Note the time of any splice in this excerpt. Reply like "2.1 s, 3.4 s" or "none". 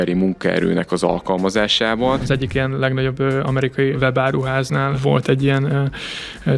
2.2 s, 4.0 s, 5.0 s